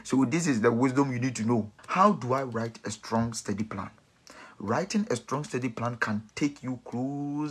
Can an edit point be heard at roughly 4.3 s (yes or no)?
no